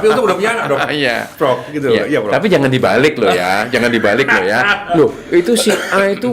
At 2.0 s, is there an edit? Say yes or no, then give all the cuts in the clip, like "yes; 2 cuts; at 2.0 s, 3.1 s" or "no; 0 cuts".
no; 1 cut; at 4.8 s